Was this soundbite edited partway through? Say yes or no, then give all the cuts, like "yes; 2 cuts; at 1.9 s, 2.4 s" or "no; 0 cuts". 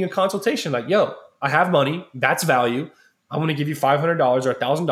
no; 0 cuts